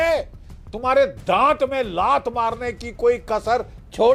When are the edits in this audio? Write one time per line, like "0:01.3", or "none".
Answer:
none